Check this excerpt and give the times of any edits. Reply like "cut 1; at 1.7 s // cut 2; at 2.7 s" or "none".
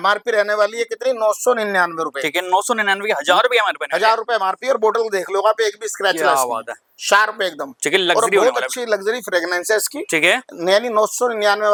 none